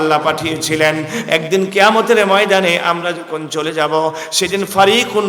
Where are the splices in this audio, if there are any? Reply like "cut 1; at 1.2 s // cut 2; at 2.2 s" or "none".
none